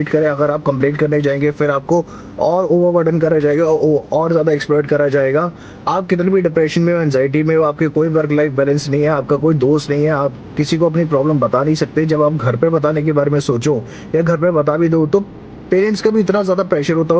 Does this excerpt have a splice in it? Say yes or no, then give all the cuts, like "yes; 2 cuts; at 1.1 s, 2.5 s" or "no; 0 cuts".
yes; 2 cuts; at 5.7 s, 15.6 s